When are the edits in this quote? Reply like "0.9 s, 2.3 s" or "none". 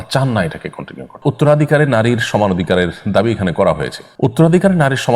1.2 s, 4.0 s